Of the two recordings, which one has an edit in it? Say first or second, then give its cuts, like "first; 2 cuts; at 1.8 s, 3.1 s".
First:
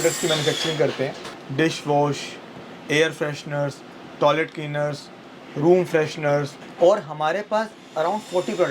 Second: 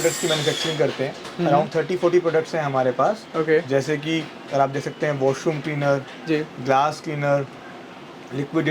first; 2 cuts; at 1.2 s, 6.6 s